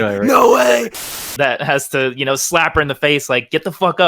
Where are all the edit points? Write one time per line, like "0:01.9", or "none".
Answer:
0:01.0